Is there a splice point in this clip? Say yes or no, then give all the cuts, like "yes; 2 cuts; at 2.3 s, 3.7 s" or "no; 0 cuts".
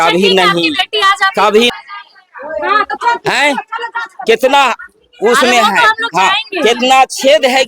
no; 0 cuts